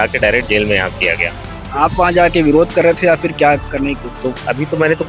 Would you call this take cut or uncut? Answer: uncut